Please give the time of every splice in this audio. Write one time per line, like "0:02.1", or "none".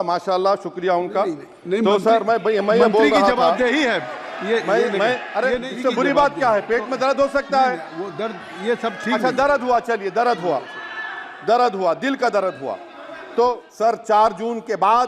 0:05.7
0:13.7